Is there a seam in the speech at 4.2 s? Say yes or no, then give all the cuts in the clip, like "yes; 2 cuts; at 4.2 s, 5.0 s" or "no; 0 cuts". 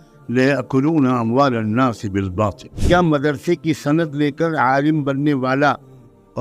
no; 1 cut; at 2.8 s